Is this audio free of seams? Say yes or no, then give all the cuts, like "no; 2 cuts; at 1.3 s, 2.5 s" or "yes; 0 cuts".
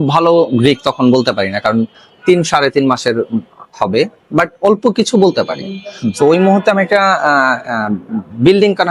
yes; 0 cuts